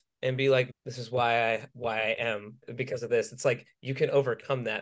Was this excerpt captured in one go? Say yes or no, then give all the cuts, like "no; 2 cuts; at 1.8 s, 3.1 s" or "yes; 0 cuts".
no; 2 cuts; at 1.7 s, 2.7 s